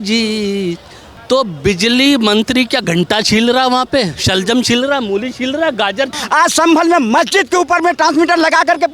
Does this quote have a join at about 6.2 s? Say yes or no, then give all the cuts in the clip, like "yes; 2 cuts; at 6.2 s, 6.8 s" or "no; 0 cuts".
yes; 2 cuts; at 1.1 s, 6.2 s